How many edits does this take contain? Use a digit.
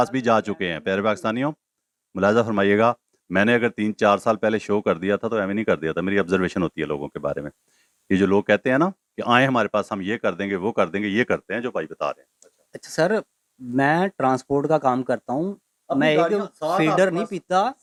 0